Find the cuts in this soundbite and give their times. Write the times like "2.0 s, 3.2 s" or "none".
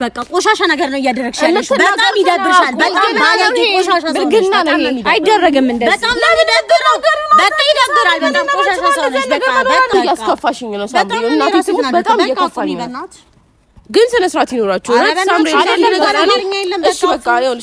9.9 s